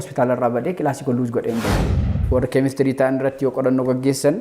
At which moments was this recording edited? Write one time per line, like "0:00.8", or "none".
0:01.9